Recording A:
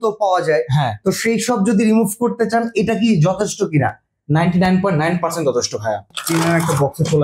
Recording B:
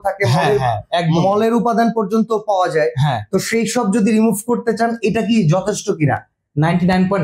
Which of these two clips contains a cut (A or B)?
A